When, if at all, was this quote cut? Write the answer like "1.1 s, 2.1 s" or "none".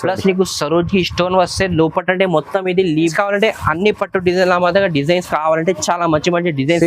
3.1 s